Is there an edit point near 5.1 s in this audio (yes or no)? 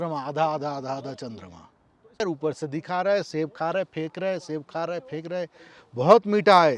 no